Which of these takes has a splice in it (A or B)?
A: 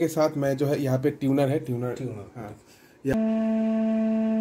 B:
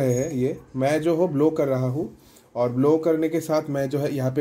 A